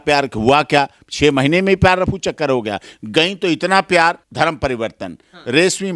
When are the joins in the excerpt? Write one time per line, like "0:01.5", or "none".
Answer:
0:04.2